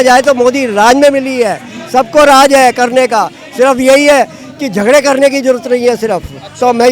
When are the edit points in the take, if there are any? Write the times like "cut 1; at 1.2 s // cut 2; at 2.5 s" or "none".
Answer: none